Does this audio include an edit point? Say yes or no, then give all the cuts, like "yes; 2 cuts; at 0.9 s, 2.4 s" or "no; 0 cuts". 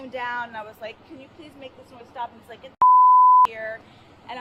no; 0 cuts